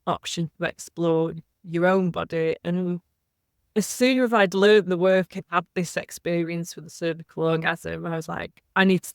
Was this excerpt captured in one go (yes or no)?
no